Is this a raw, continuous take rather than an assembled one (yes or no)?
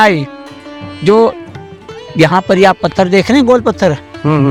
yes